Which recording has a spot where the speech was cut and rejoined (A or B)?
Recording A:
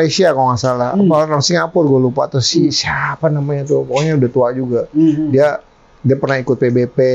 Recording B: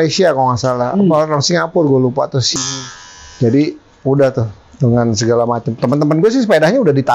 B